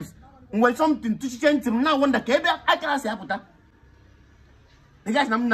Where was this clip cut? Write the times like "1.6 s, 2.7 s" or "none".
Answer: none